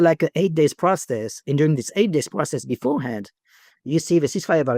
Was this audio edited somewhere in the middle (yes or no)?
no